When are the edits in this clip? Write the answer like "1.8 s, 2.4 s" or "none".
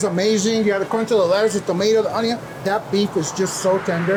none